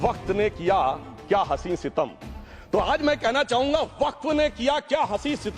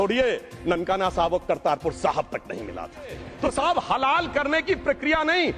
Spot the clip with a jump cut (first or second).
second